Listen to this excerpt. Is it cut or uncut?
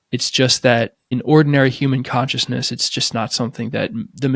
cut